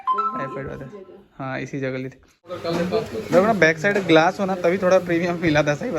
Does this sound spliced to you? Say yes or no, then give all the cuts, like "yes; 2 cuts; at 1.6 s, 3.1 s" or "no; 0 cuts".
yes; 1 cut; at 2.6 s